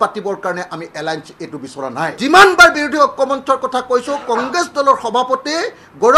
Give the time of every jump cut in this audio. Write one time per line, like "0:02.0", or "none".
0:02.2